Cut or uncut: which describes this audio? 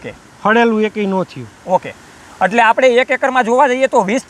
uncut